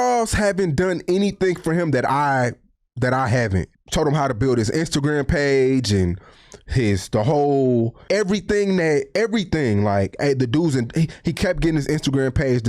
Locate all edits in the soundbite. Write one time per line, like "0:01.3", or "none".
0:03.8
0:08.0